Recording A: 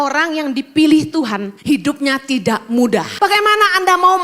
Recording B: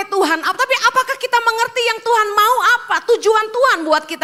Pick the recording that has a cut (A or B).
A